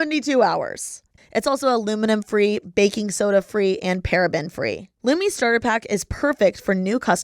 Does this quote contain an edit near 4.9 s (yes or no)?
yes